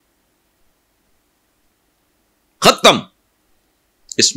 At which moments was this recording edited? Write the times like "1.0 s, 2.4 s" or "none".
none